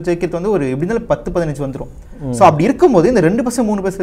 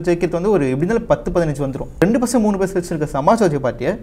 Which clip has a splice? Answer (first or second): second